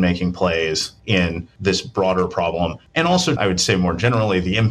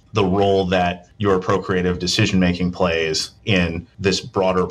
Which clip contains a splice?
first; 1 cut; at 3.4 s

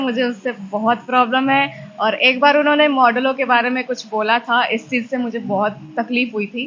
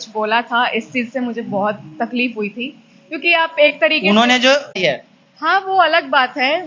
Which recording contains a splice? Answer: second; 1 cut; at 4.8 s

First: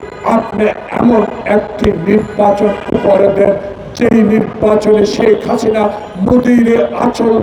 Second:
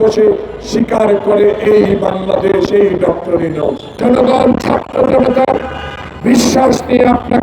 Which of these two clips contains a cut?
second; 1 cut; at 3.8 s

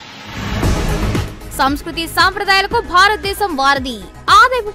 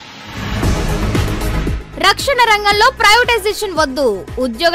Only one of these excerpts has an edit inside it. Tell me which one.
first; 1 cut; at 1.2 s

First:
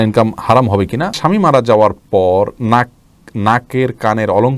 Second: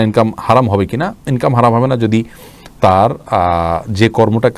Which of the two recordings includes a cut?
first; 1 cut; at 1.2 s

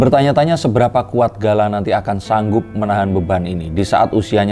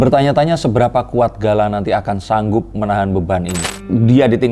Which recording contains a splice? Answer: second; 1 cut; at 3.6 s

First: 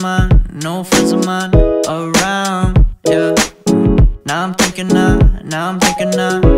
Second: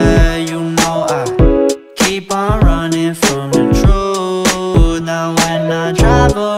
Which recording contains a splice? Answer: second; 1 cut; at 4.7 s

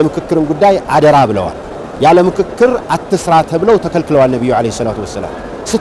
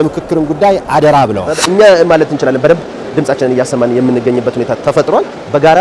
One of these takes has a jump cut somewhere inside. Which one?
second; 1 cut; at 1.5 s

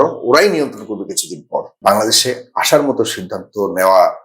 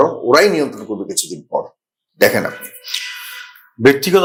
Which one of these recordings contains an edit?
first; 1 cut; at 1.7 s

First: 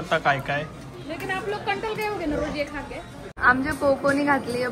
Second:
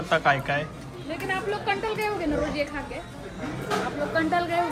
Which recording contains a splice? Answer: first; 1 cut; at 3.3 s

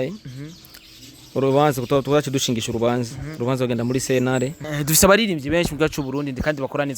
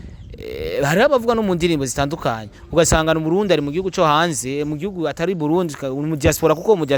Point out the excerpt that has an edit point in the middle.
first; 1 cut; at 4.7 s

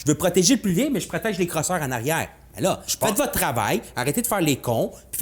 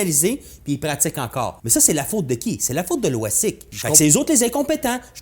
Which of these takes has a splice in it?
second; 2 cuts; at 1.6 s, 3.7 s

